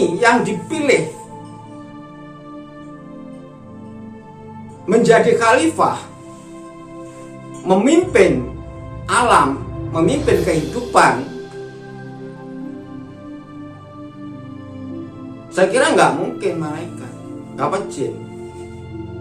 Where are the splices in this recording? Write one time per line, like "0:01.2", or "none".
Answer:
none